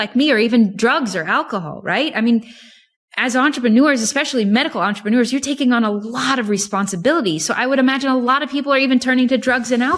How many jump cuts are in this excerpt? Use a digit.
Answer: 0